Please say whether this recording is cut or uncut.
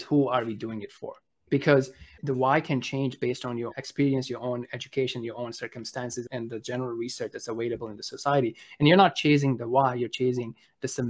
cut